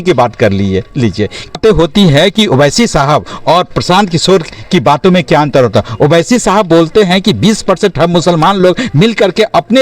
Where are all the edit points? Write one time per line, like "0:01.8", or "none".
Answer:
0:01.6